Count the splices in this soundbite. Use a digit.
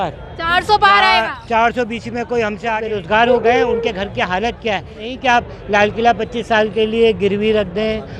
2